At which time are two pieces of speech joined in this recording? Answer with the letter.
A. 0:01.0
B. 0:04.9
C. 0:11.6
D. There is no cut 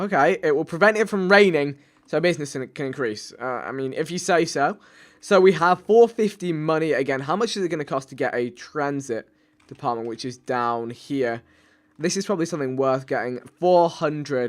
C